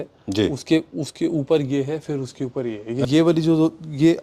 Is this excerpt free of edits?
no; 1 cut; at 3.1 s

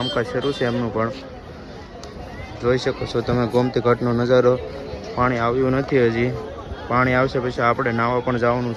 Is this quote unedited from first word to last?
yes; 0 cuts

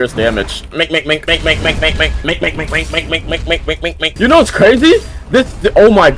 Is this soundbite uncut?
no; 1 cut; at 4.1 s

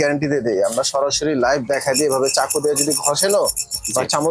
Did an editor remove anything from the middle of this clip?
no; 0 cuts

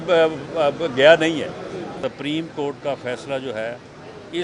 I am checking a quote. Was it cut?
yes; 1 cut; at 1.9 s

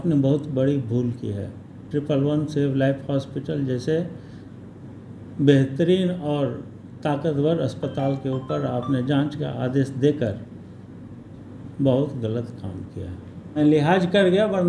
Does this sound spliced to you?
yes; 1 cut; at 13.6 s

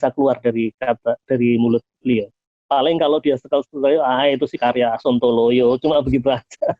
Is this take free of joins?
yes; 0 cuts

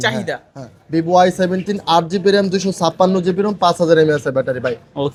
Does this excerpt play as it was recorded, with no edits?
yes; 0 cuts

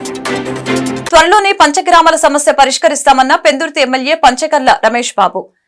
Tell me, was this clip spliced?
no; 0 cuts

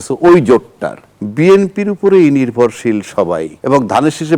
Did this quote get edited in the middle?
yes; 2 cuts; at 1.2 s, 3.5 s

